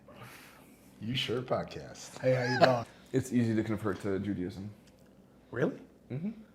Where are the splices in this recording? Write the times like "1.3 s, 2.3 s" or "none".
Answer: 2.9 s